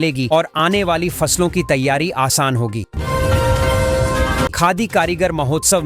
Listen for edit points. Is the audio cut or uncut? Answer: cut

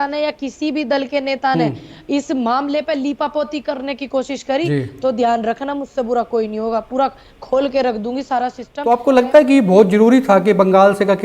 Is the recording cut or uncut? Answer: cut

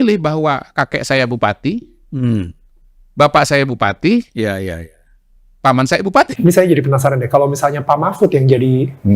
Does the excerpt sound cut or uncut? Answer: cut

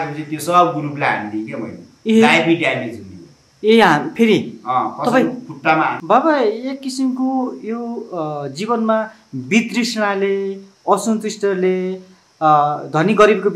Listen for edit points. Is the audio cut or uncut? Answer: cut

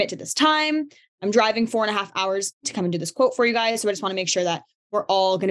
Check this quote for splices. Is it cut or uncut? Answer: cut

